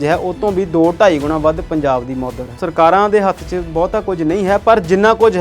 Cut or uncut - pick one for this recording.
cut